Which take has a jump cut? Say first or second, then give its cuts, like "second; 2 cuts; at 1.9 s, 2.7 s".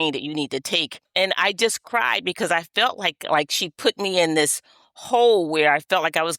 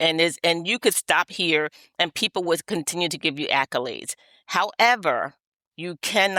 first; 1 cut; at 1.0 s